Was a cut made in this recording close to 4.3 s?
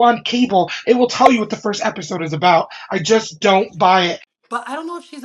yes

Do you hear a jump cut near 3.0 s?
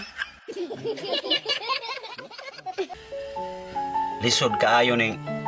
yes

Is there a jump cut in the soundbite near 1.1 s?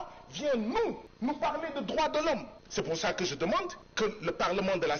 yes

